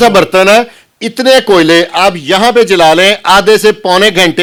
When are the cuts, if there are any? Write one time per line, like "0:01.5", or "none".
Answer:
none